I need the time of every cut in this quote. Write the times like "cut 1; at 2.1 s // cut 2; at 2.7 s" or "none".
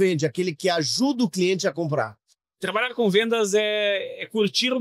cut 1; at 2.3 s